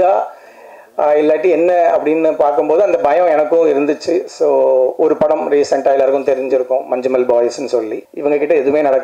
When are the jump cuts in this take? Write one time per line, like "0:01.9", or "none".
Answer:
0:08.0